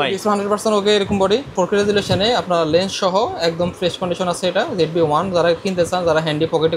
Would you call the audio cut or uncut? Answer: cut